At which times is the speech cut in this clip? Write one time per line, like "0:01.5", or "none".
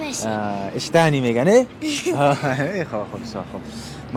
none